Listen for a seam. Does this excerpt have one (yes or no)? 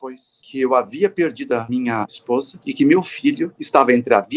no